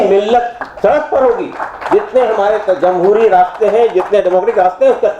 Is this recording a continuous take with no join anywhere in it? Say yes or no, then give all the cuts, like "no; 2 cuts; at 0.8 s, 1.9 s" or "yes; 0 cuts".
yes; 0 cuts